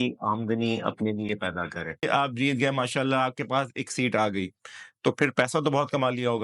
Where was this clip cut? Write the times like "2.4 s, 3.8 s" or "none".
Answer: 2.0 s